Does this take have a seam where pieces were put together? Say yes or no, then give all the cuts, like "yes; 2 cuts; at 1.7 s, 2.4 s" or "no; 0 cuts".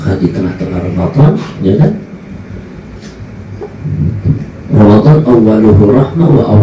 no; 0 cuts